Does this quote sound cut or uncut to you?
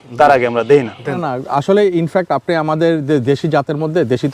cut